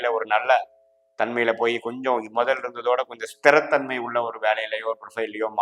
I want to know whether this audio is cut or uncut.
uncut